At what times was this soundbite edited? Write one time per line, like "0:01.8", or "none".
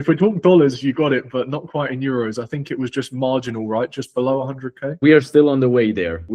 0:04.9